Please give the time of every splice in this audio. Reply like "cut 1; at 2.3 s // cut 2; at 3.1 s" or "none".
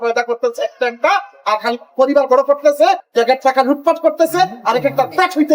cut 1; at 3.1 s